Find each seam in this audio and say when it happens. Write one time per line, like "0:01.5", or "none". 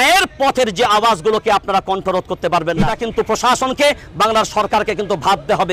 0:02.9

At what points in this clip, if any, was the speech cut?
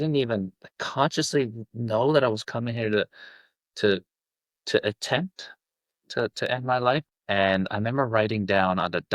0:07.0

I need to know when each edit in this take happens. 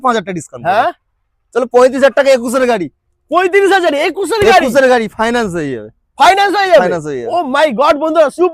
none

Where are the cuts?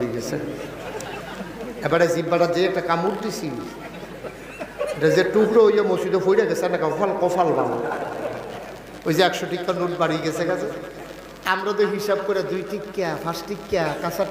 none

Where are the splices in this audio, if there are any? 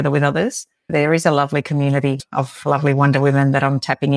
0:00.9
0:02.2

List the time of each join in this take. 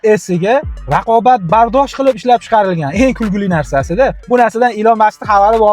0:04.2

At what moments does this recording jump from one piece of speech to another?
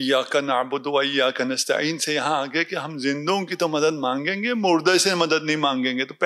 none

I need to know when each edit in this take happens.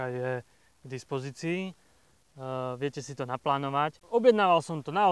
0:04.0

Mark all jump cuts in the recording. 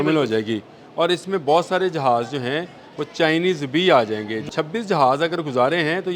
0:04.5

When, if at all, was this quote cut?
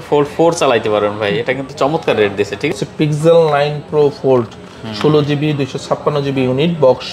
0:02.8

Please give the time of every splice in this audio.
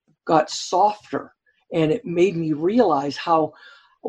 none

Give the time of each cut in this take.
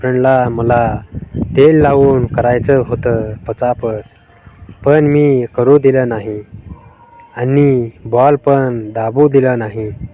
none

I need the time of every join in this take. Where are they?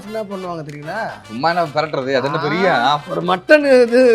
0:03.1

